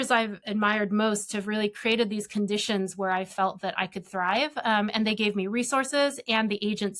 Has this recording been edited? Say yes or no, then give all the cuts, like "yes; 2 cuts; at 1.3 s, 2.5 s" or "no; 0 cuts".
no; 0 cuts